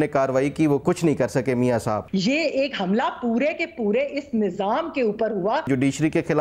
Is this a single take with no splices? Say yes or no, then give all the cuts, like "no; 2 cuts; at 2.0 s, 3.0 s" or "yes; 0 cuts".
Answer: no; 3 cuts; at 0.8 s, 2.0 s, 5.7 s